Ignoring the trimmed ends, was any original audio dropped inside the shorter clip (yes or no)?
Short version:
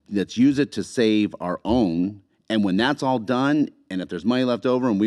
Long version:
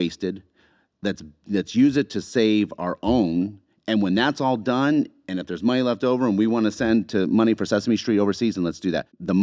no